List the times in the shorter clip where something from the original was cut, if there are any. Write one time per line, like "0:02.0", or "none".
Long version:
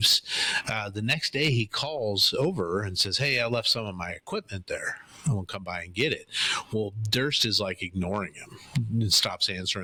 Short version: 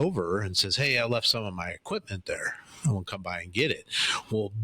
none